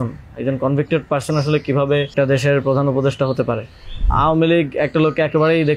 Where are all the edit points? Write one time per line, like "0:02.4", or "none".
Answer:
0:02.1
0:04.1